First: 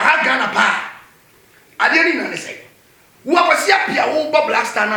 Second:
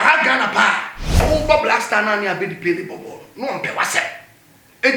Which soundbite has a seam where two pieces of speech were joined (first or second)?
second